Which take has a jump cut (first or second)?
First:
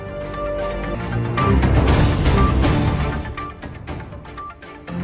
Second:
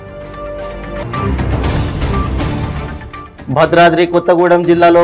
second